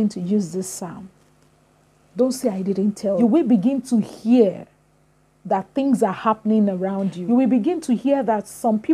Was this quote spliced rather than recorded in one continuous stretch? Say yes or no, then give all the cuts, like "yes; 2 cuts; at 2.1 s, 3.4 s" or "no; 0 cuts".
yes; 2 cuts; at 3.2 s, 7.2 s